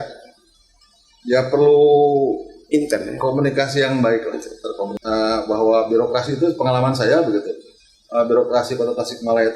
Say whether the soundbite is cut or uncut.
cut